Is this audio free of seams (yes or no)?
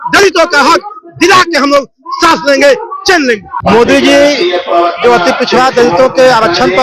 no